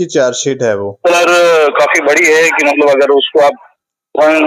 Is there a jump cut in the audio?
no; 0 cuts

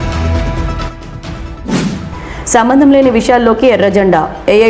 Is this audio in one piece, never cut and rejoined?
no; 2 cuts; at 0.7 s, 1.8 s

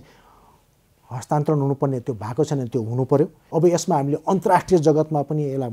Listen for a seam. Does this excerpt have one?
yes; 1 cut; at 3.4 s

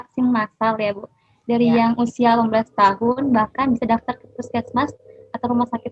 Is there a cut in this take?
no; 0 cuts

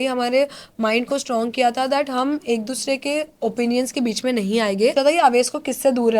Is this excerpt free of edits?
no; 1 cut; at 4.9 s

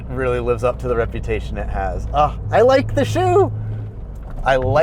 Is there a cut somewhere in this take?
no; 0 cuts

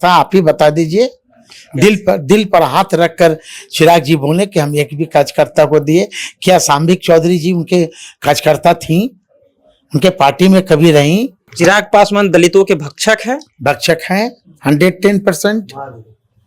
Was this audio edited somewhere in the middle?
yes; 1 cut; at 11.4 s

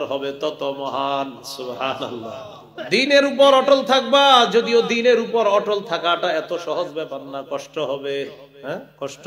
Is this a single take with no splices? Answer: no; 1 cut; at 2.6 s

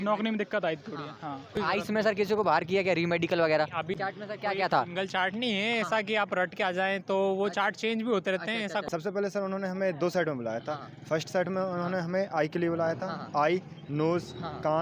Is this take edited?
yes; 3 cuts; at 1.6 s, 4.0 s, 8.9 s

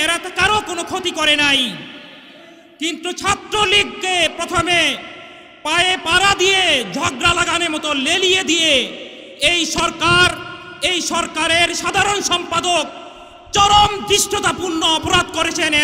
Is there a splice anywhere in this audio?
no; 0 cuts

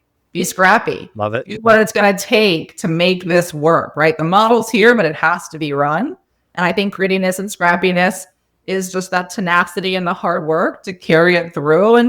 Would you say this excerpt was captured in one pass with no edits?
yes; 0 cuts

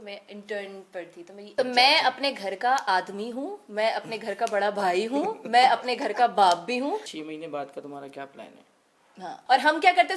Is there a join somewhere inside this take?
yes; 3 cuts; at 1.4 s, 7.1 s, 9.3 s

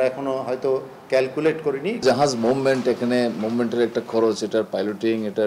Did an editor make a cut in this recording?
yes; 1 cut; at 2.0 s

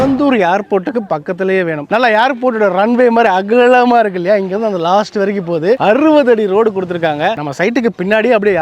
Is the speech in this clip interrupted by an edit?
yes; 2 cuts; at 1.8 s, 7.4 s

